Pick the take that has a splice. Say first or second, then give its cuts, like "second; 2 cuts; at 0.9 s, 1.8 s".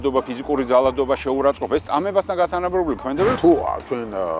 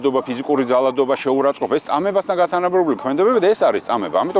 first; 1 cut; at 3.3 s